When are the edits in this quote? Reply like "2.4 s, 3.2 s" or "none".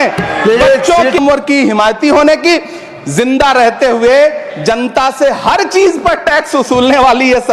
1.2 s